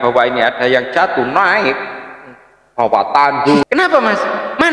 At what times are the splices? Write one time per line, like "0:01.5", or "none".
0:03.6